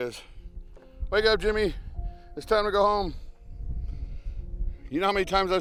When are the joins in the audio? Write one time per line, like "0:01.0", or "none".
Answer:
none